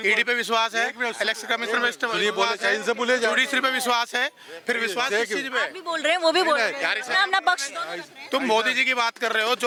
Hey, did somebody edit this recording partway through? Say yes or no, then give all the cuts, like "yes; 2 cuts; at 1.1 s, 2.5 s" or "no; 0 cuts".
no; 0 cuts